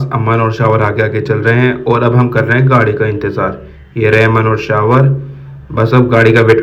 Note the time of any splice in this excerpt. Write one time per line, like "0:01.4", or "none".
none